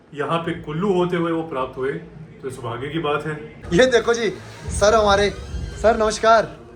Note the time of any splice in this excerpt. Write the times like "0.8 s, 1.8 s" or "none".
3.6 s